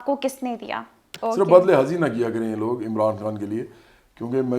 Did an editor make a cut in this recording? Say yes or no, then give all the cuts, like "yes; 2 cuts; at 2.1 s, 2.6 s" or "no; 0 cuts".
yes; 1 cut; at 1.1 s